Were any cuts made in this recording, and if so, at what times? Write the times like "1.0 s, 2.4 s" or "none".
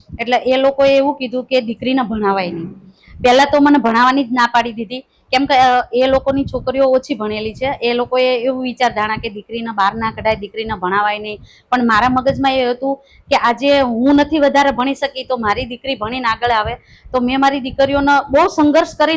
none